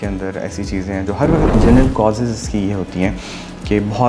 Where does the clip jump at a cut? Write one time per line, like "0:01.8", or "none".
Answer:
0:01.5

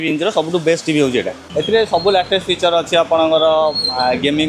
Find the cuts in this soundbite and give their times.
0:01.4

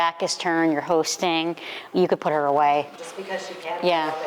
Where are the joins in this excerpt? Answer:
0:02.9

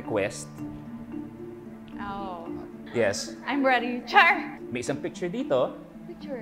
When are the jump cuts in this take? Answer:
0:02.8
0:04.6

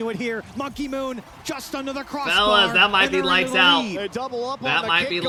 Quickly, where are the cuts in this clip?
none

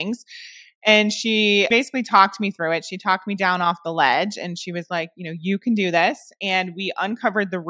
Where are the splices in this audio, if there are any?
0:01.7

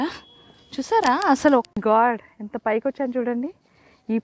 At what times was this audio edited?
0:01.7

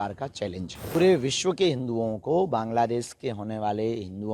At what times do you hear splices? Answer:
0:01.0

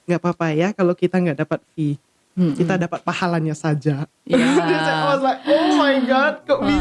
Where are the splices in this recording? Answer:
none

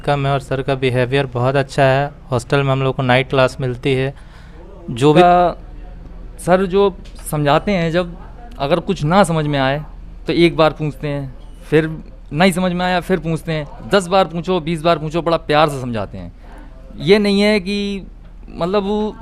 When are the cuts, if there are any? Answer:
0:05.2

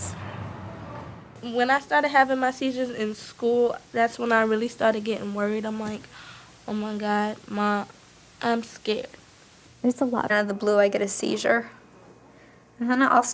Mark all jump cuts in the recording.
none

